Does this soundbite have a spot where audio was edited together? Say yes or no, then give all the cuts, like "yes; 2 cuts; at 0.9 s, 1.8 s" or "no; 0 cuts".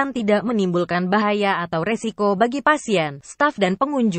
no; 0 cuts